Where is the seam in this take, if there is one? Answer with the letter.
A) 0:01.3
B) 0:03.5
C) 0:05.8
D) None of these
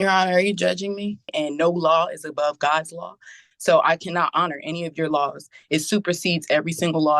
A